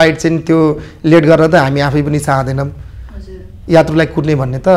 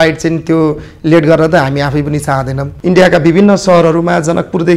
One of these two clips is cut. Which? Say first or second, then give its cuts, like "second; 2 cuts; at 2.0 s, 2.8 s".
second; 1 cut; at 2.7 s